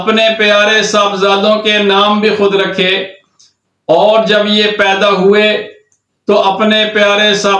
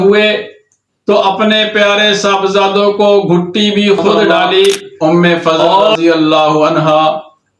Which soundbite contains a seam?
second; 1 cut; at 4.9 s

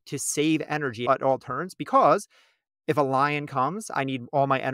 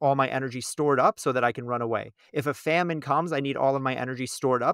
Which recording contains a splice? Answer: first; 1 cut; at 1.0 s

